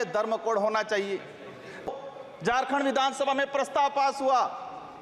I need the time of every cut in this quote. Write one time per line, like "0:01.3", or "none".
0:01.9